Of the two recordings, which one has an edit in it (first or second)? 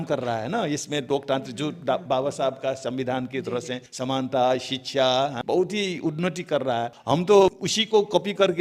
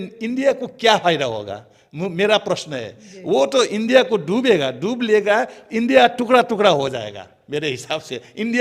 first